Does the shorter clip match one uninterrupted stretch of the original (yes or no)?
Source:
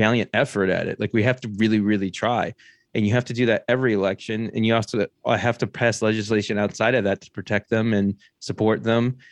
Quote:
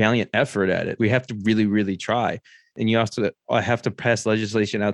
no